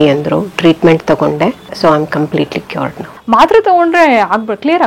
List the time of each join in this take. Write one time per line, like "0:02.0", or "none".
0:01.7
0:03.1